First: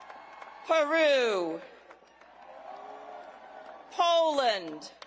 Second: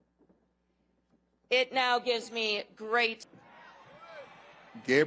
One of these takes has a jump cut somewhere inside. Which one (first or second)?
second